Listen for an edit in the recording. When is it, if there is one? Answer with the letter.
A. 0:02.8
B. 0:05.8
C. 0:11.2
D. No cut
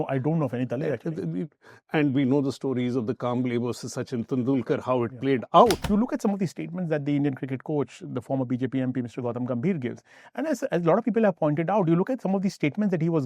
B